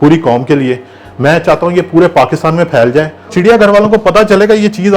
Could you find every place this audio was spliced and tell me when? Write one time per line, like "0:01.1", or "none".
0:03.3